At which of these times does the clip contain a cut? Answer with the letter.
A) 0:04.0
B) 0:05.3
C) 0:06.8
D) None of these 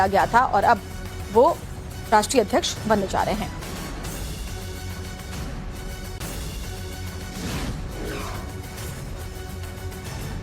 D